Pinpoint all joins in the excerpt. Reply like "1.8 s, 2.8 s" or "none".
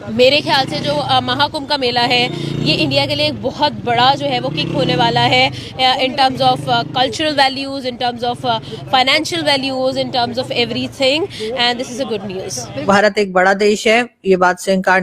12.8 s